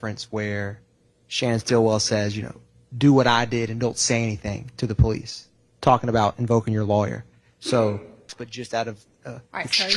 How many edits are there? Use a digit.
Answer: 1